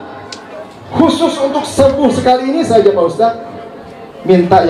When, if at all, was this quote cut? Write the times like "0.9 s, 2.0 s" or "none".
none